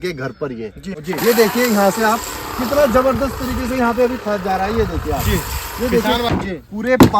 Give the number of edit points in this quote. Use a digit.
2